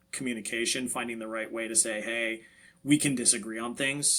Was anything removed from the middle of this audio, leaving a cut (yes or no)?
no